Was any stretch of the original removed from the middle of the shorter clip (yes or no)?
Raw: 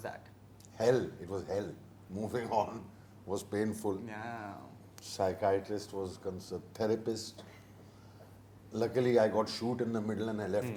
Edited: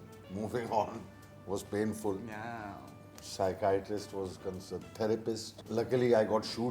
yes